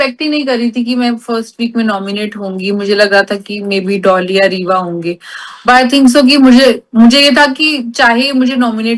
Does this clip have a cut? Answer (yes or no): no